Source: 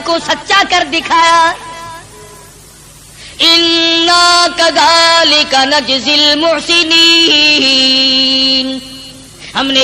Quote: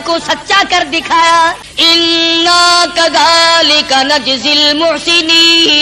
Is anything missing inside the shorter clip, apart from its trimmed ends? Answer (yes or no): yes